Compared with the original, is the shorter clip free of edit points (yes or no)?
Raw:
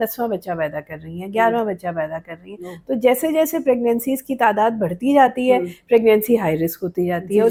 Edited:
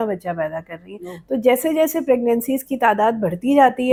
yes